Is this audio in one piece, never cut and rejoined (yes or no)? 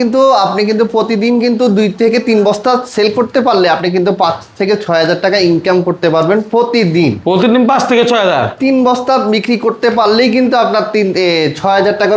yes